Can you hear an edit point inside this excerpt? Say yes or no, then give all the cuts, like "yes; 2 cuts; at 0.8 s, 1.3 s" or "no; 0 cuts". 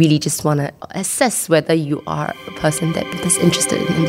no; 0 cuts